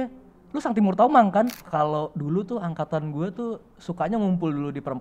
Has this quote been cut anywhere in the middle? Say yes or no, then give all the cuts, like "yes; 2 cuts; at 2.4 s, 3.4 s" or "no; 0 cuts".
yes; 1 cut; at 1.6 s